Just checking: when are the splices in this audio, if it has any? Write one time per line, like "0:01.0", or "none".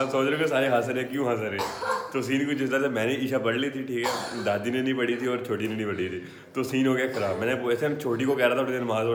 none